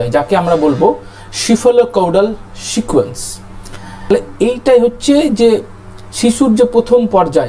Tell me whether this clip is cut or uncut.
cut